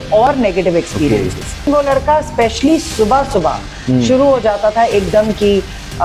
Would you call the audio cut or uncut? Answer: cut